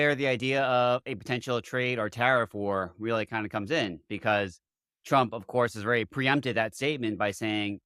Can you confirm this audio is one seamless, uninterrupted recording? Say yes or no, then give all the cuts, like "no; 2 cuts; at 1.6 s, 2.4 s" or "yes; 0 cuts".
yes; 0 cuts